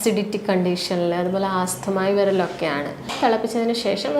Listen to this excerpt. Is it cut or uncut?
cut